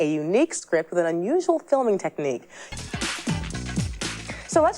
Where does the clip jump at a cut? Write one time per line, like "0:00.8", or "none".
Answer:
0:02.7